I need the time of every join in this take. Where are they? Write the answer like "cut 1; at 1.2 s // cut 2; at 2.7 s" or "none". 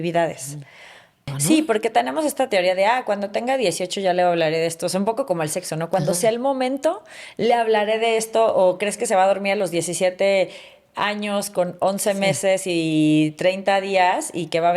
cut 1; at 1.3 s